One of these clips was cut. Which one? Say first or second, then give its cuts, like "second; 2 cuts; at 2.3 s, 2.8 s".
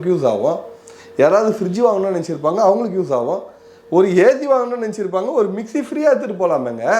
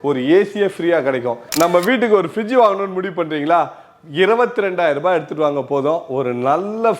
second; 1 cut; at 1.4 s